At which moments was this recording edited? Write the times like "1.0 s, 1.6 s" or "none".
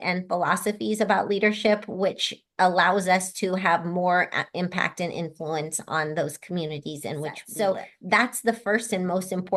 7.4 s